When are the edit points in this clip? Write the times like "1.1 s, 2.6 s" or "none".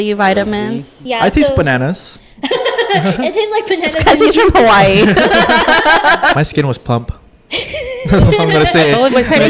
0.9 s, 6.4 s